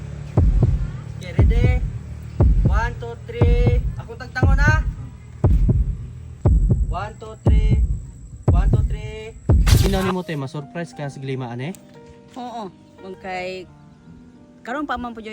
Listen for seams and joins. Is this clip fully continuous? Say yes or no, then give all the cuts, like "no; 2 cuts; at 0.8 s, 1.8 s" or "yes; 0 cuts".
no; 1 cut; at 9.8 s